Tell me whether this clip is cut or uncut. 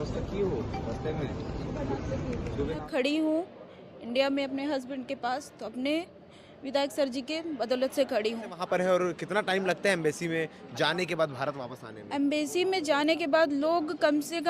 cut